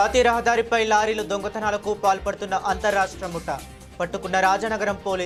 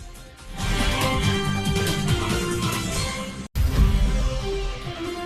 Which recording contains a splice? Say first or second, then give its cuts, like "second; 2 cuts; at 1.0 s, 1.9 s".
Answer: second; 1 cut; at 3.5 s